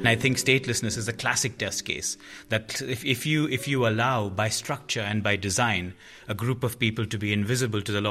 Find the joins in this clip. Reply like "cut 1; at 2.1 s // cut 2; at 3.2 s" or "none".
cut 1; at 0.9 s